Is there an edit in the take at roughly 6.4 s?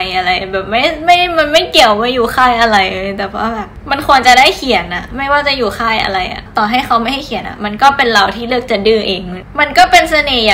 yes; 2 cuts; at 6.4 s, 9.4 s

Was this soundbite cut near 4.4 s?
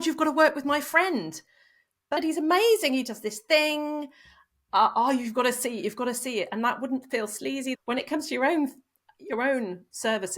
no; 2 cuts; at 2.2 s, 7.7 s

